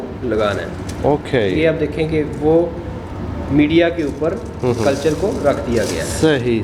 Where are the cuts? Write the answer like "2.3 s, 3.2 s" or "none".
none